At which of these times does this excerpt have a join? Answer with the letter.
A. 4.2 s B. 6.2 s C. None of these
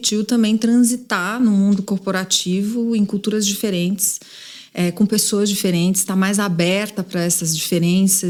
C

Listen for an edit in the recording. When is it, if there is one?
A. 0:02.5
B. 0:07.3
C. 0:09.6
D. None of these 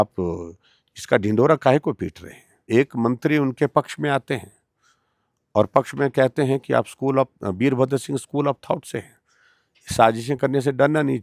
A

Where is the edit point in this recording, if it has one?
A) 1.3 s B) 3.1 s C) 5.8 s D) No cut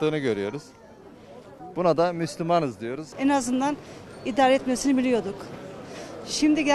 B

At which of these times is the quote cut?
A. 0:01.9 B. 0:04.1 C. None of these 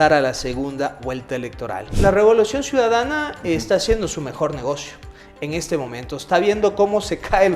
A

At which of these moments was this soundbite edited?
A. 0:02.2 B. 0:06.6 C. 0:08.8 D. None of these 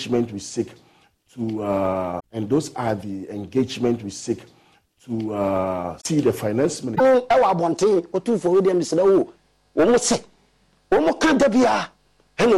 A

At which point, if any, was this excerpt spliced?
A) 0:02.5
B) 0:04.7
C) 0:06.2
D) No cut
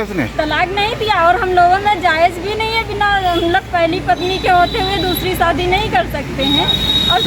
D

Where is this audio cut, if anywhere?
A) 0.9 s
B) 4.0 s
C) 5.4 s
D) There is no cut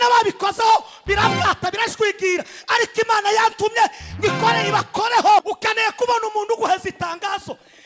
C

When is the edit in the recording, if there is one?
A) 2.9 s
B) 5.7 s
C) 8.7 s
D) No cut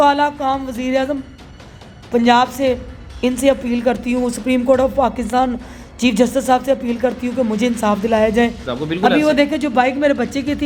C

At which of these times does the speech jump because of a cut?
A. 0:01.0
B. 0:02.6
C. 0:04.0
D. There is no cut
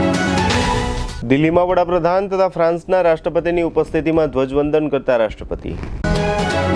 A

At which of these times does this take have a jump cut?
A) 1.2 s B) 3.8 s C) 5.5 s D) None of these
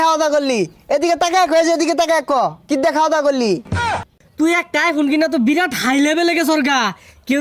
B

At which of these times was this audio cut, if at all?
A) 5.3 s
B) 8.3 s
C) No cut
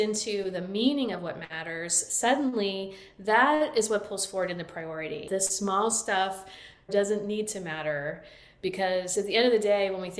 A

